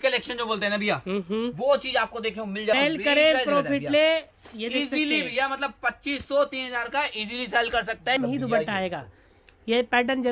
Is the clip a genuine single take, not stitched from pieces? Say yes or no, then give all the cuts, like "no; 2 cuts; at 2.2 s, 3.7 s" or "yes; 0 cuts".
no; 2 cuts; at 2.7 s, 8.2 s